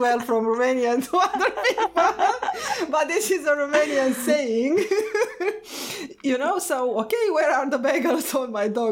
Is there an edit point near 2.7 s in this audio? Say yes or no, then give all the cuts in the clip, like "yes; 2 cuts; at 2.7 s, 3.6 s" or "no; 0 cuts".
no; 0 cuts